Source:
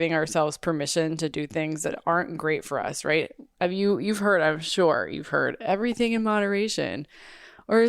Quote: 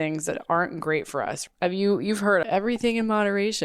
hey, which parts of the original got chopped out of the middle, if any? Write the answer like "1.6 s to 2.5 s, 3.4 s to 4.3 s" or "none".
3.0 s to 3.4 s, 4.4 s to 5.6 s

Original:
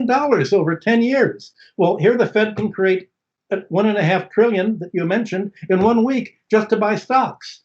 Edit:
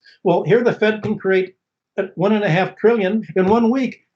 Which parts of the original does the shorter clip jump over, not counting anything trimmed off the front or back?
4.8 s to 5.6 s

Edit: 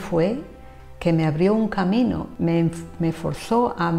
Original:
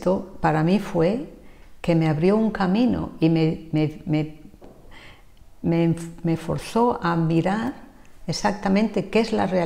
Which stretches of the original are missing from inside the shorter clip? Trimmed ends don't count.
3.1 s to 5.5 s

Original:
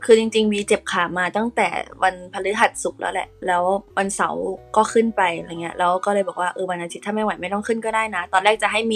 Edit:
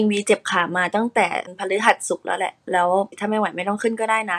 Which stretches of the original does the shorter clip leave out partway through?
1.9 s to 2.2 s, 3.9 s to 7.0 s

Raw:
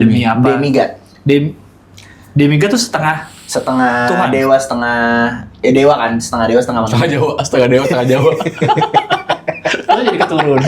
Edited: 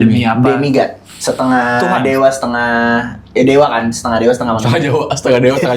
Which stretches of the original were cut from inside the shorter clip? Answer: 1.1 s to 3.3 s

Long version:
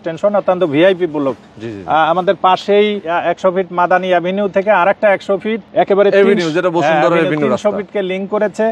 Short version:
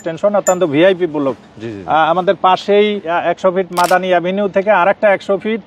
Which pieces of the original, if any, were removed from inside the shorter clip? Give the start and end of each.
none

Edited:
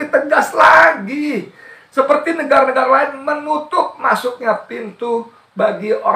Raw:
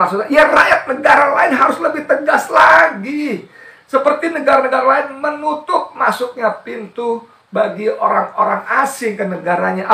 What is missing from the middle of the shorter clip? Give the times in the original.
none

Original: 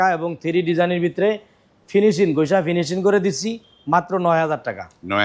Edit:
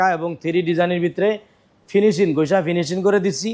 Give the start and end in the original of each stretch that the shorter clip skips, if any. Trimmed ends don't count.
none

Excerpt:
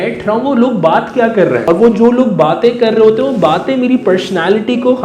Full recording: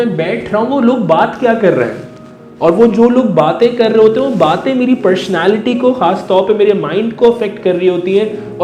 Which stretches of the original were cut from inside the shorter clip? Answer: 1.9 s to 2.6 s

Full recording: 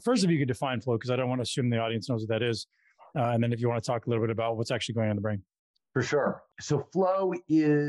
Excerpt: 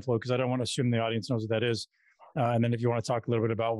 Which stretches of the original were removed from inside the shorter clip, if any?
none

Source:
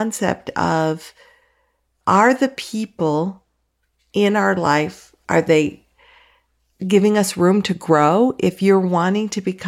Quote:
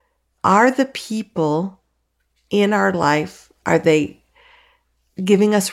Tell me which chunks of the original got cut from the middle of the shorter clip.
none

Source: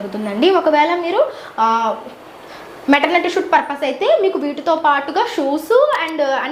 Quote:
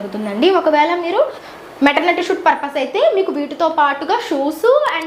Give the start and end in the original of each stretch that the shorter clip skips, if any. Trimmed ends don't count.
1.4 s to 2.5 s

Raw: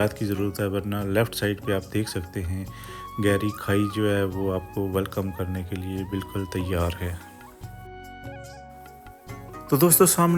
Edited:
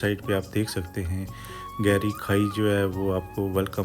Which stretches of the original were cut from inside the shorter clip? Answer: none

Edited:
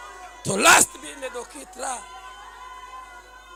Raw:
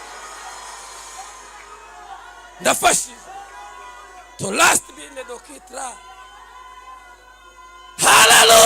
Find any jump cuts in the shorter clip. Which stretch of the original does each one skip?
none

